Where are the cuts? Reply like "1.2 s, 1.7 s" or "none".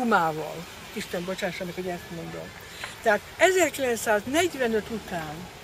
none